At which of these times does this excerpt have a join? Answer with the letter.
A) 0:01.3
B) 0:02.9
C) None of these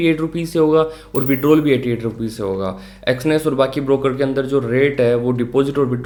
C